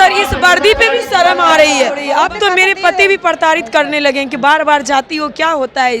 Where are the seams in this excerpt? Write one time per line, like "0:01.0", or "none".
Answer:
0:02.0